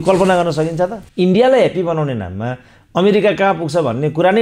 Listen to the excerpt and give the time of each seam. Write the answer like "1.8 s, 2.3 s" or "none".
1.0 s